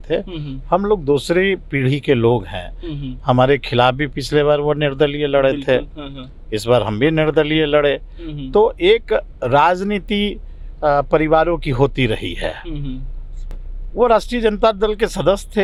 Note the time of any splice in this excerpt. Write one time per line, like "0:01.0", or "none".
none